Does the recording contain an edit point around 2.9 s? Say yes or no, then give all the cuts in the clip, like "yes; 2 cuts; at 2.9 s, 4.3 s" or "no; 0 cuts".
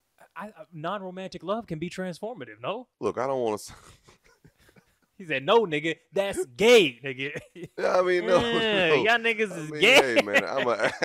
yes; 1 cut; at 2.9 s